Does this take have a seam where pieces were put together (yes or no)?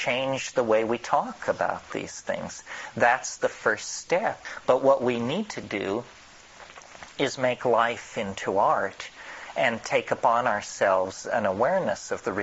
yes